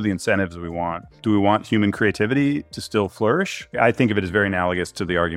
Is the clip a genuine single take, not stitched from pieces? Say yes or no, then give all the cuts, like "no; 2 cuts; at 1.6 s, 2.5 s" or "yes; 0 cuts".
no; 2 cuts; at 1.2 s, 3.8 s